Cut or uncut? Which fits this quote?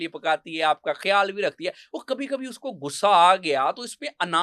uncut